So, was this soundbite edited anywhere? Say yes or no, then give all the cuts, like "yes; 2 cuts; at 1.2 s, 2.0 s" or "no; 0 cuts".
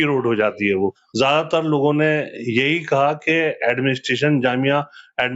yes; 1 cut; at 1.0 s